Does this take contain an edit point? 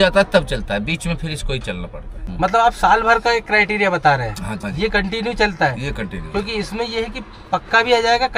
no; 0 cuts

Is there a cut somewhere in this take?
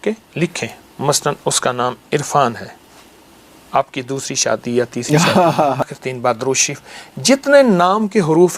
yes; 1 cut; at 5.9 s

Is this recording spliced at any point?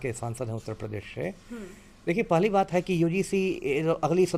no; 0 cuts

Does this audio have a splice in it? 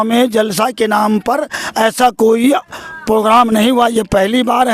no; 0 cuts

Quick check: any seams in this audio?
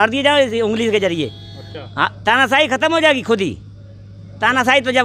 no; 0 cuts

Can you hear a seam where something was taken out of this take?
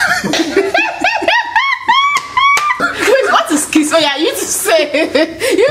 yes; 1 cut; at 2.9 s

